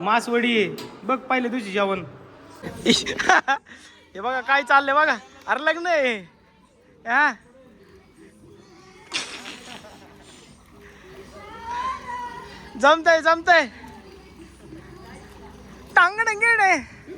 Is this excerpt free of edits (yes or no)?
no